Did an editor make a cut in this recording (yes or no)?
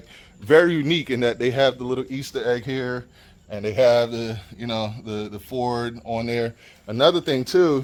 no